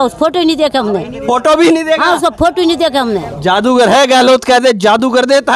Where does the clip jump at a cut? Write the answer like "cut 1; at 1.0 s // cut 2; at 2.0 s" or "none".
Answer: cut 1; at 3.3 s

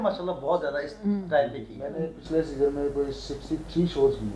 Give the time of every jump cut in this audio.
none

